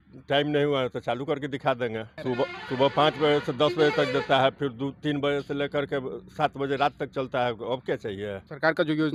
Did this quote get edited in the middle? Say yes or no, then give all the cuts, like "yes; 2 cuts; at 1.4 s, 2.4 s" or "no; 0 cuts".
no; 0 cuts